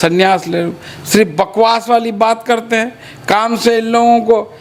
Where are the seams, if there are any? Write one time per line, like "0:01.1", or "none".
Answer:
none